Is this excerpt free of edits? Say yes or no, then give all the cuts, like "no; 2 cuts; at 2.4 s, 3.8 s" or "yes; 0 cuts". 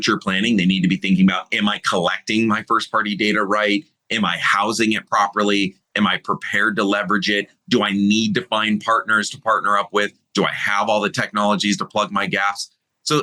yes; 0 cuts